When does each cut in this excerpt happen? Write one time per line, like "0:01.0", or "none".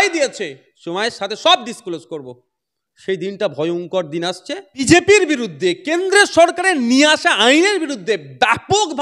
0:04.9